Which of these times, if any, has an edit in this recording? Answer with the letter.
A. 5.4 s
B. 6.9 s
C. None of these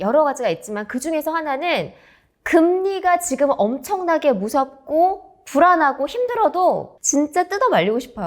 B